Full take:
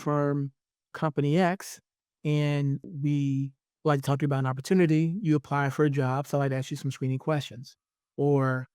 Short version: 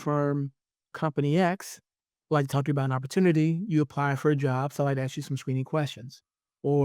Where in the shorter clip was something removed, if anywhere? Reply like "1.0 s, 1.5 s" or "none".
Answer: 2.1 s

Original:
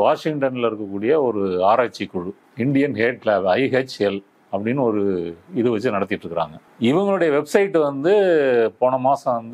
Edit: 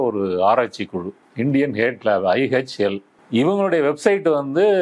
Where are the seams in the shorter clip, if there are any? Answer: 3.1 s

